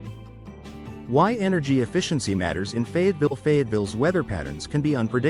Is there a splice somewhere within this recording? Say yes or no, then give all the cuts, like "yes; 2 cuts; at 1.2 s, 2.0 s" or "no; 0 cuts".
no; 0 cuts